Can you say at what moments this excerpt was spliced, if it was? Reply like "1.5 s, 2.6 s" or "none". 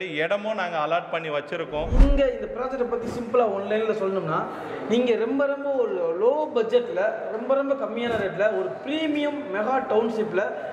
1.9 s